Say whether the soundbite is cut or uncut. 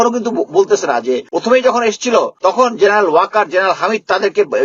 cut